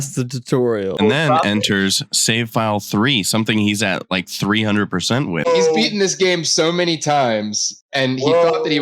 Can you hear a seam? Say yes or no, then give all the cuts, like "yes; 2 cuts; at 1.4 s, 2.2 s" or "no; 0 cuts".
yes; 2 cuts; at 0.9 s, 5.5 s